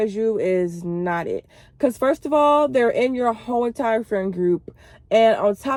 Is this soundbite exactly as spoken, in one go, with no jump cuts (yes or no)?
yes